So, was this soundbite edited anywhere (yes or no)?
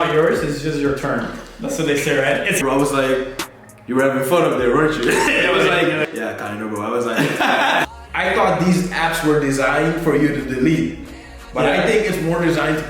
yes